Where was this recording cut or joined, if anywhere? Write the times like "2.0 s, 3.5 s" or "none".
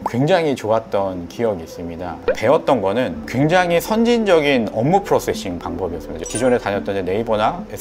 2.2 s